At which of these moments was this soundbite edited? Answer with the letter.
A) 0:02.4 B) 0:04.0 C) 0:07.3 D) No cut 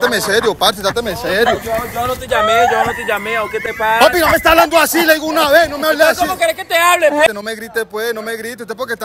C